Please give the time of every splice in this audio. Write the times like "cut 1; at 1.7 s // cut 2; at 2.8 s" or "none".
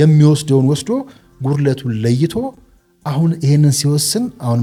none